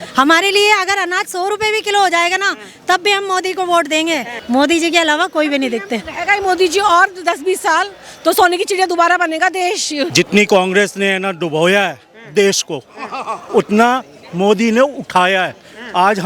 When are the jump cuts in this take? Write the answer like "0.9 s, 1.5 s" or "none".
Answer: 4.3 s, 10.1 s